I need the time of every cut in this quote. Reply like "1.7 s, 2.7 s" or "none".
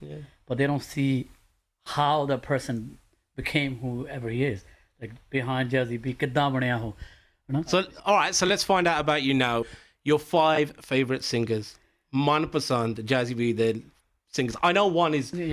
8.3 s